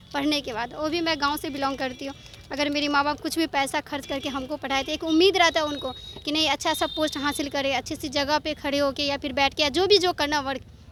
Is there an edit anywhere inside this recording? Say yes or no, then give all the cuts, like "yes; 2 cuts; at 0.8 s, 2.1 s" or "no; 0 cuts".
no; 0 cuts